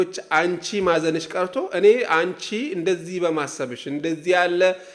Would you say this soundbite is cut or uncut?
uncut